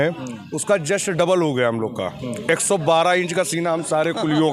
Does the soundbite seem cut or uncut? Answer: uncut